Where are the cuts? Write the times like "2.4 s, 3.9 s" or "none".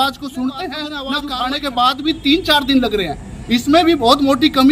1.0 s